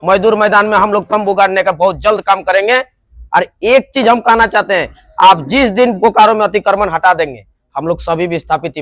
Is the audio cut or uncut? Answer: uncut